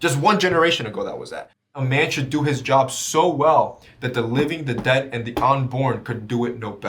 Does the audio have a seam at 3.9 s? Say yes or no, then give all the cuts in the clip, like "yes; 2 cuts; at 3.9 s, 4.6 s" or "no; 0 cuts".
no; 1 cut; at 1.7 s